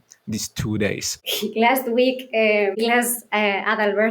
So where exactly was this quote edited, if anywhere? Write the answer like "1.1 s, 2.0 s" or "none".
1.1 s, 2.8 s